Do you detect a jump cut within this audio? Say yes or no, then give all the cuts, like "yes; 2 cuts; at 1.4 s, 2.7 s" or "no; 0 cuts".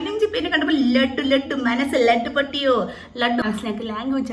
yes; 1 cut; at 3.4 s